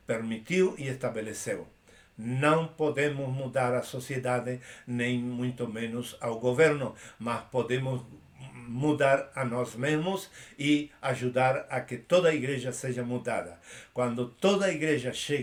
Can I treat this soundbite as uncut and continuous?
yes; 0 cuts

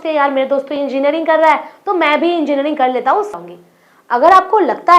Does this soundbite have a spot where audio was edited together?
yes; 1 cut; at 3.3 s

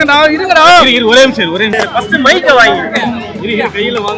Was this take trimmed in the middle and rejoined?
yes; 1 cut; at 1.7 s

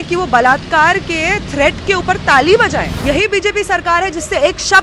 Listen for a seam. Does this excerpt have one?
yes; 1 cut; at 2.9 s

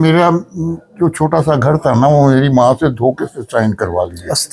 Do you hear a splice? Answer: no; 0 cuts

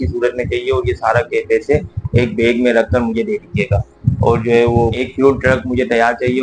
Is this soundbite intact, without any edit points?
yes; 0 cuts

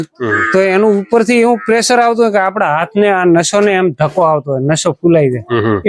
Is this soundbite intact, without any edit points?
yes; 0 cuts

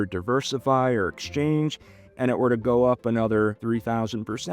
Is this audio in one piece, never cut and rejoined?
no; 1 cut; at 3.6 s

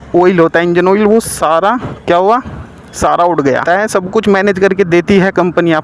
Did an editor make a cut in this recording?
yes; 1 cut; at 3.6 s

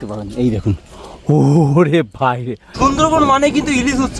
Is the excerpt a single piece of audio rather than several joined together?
no; 1 cut; at 2.6 s

